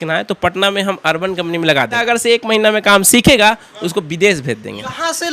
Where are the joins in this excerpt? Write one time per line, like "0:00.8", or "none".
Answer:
none